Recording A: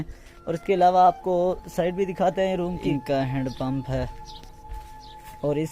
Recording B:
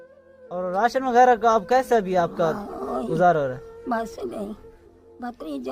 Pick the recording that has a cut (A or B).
A